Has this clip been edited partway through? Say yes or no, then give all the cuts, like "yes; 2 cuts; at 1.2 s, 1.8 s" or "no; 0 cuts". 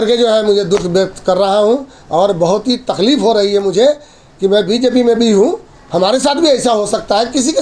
no; 0 cuts